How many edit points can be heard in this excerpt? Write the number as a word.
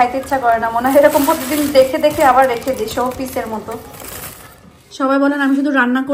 one